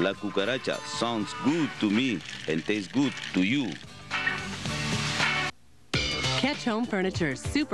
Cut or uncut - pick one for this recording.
cut